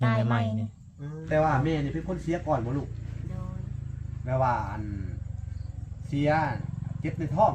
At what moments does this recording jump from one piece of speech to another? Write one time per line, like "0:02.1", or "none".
0:01.1